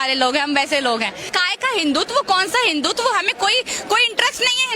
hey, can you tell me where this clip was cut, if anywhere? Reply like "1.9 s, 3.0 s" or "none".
1.3 s